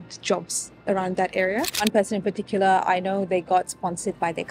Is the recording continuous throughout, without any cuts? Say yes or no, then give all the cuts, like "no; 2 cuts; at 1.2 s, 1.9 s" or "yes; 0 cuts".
no; 1 cut; at 1.8 s